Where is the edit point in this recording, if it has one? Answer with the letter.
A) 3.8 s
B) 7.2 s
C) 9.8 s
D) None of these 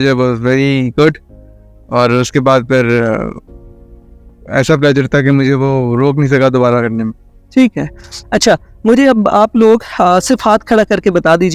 D